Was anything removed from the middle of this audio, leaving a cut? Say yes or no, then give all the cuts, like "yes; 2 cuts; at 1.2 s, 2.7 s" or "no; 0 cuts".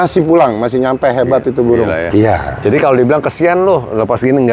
yes; 1 cut; at 2.0 s